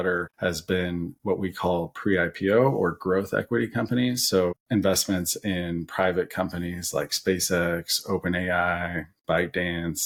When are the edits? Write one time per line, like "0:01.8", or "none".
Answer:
none